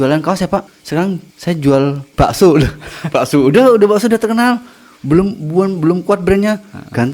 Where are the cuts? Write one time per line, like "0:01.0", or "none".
0:00.9
0:02.1

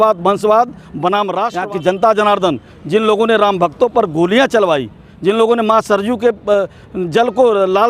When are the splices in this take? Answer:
0:01.5

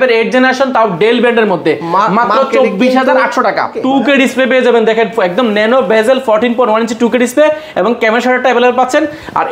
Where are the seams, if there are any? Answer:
0:03.8

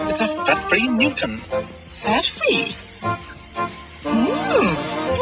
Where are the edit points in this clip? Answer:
none

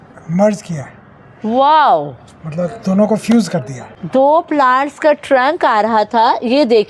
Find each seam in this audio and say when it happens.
none

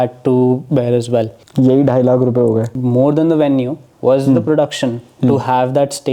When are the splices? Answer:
0:01.4
0:02.7

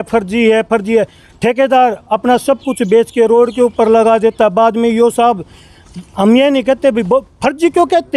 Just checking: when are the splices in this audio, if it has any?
none

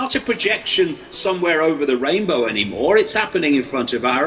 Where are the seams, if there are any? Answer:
none

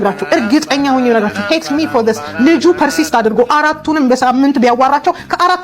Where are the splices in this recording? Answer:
none

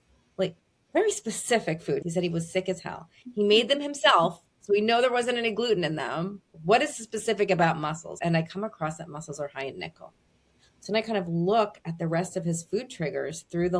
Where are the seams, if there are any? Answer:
0:02.0
0:06.5
0:08.1

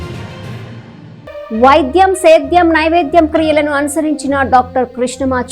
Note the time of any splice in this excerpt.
0:00.9

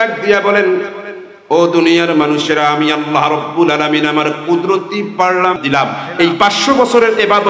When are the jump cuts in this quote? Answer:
0:05.6

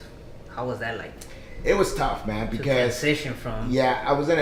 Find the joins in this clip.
none

